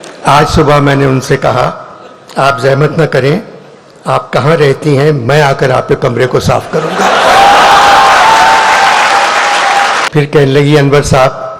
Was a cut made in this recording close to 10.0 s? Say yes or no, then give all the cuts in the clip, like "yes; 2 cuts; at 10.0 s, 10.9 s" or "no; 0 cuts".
yes; 1 cut; at 10.0 s